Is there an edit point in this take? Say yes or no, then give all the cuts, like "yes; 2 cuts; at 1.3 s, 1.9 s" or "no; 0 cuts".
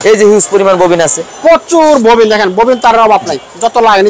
no; 0 cuts